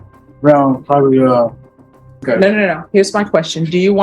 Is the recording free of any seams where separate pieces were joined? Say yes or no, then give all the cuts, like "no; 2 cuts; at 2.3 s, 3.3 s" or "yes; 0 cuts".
no; 1 cut; at 2.2 s